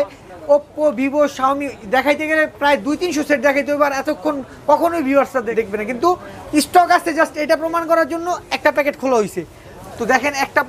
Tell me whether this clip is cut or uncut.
cut